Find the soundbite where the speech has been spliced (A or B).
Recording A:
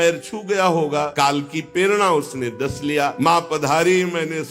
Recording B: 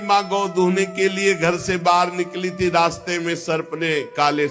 A